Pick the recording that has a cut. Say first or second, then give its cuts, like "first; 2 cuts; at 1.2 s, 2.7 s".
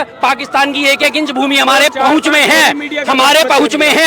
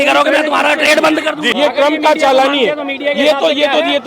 second; 1 cut; at 1.4 s